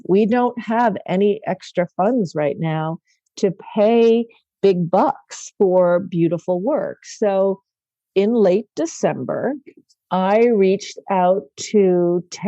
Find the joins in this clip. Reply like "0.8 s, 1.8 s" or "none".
none